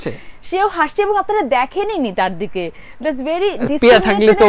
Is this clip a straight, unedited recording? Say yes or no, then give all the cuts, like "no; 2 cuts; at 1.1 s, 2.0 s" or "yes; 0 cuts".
yes; 0 cuts